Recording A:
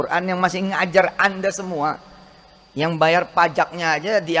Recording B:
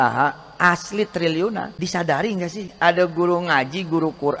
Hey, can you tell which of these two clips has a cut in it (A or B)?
B